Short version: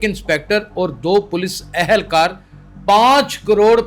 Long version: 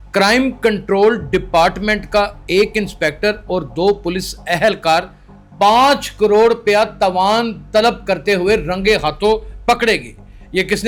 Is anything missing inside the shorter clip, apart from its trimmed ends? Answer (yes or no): no